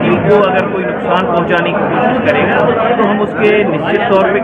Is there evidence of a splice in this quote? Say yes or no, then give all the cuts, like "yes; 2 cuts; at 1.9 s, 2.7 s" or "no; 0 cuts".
no; 0 cuts